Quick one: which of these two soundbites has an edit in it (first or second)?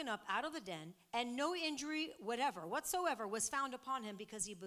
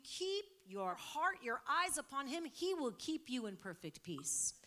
second